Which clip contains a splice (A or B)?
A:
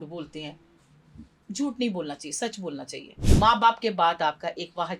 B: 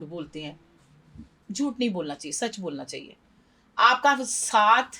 A